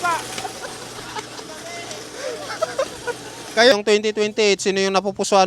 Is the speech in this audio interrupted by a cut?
yes; 1 cut; at 3.7 s

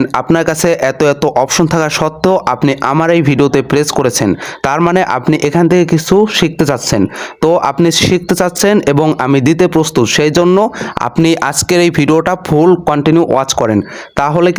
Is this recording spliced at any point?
no; 0 cuts

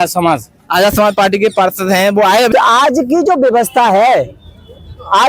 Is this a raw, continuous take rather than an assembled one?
no; 1 cut; at 2.5 s

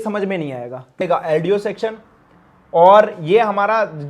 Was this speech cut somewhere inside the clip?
yes; 1 cut; at 1.0 s

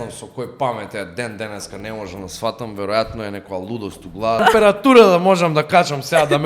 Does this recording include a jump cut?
yes; 1 cut; at 4.4 s

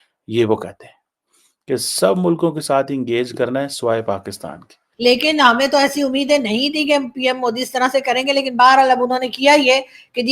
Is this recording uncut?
no; 1 cut; at 4.8 s

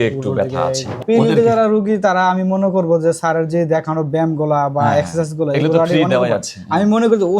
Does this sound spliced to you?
yes; 1 cut; at 0.9 s

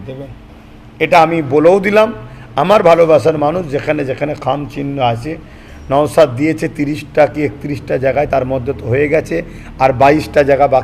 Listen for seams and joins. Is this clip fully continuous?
yes; 0 cuts

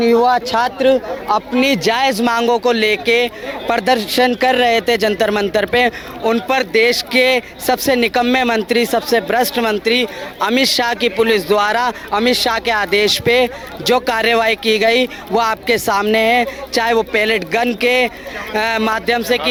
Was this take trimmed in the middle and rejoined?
no; 0 cuts

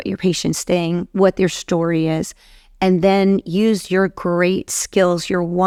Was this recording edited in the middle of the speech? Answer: no; 0 cuts

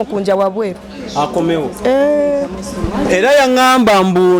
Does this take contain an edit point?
no; 0 cuts

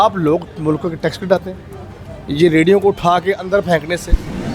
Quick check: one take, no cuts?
yes; 0 cuts

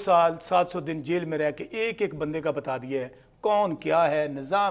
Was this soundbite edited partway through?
no; 0 cuts

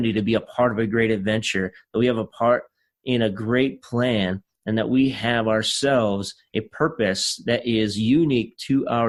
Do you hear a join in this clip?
no; 0 cuts

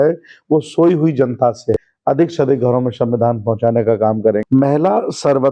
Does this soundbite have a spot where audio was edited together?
yes; 2 cuts; at 1.9 s, 4.4 s

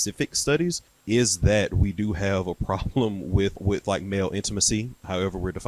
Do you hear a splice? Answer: yes; 2 cuts; at 0.9 s, 3.6 s

